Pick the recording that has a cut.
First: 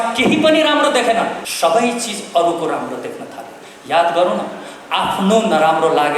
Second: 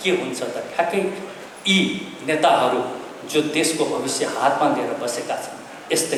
first; 1 cut; at 1.4 s

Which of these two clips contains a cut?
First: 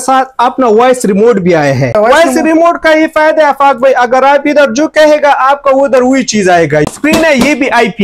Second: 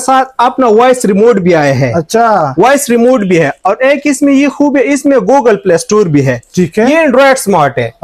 first; 2 cuts; at 1.9 s, 6.9 s

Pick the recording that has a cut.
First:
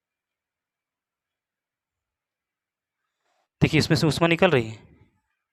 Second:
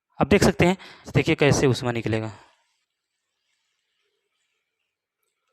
second; 1 cut; at 1.1 s

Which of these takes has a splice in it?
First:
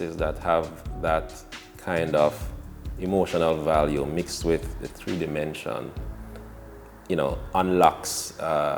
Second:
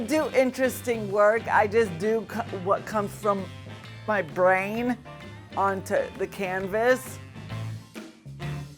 second; 1 cut; at 7.4 s

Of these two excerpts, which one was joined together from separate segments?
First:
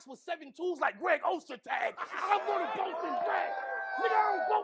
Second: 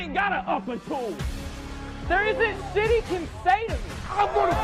first; 1 cut; at 2.1 s

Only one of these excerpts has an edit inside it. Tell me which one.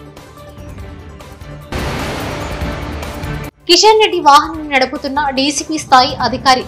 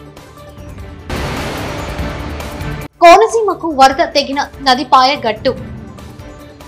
first; 1 cut; at 1.0 s

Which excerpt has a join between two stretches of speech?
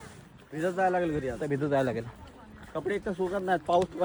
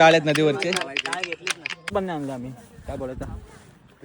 second; 1 cut; at 1.9 s

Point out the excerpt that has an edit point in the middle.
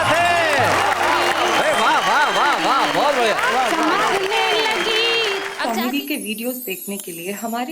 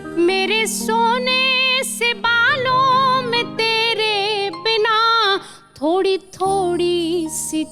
first; 1 cut; at 5.5 s

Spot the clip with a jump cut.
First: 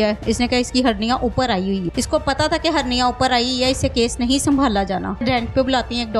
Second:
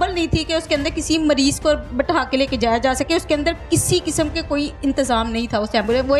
first; 2 cuts; at 1.9 s, 5.2 s

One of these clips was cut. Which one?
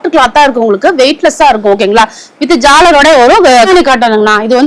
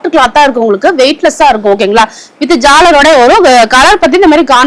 first; 1 cut; at 3.7 s

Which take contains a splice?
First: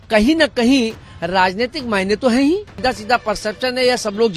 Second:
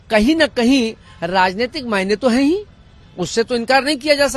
first; 1 cut; at 2.7 s

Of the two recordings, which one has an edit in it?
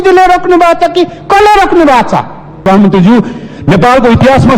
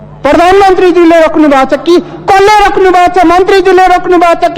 first; 1 cut; at 2.7 s

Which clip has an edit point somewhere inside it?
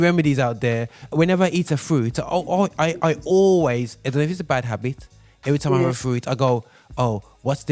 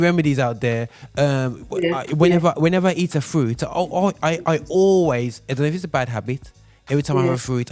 first; 1 cut; at 1.1 s

